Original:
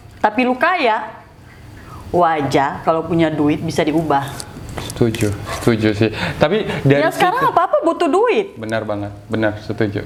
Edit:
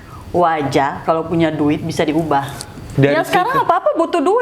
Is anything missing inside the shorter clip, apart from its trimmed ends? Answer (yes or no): yes